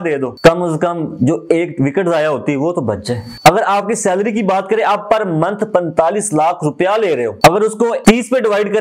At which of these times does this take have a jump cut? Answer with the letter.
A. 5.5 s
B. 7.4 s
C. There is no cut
C